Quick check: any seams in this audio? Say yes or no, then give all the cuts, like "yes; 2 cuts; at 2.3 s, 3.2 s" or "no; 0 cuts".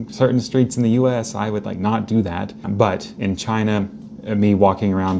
yes; 1 cut; at 2.6 s